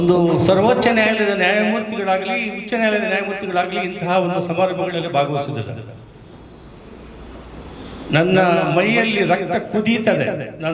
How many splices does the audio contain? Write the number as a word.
zero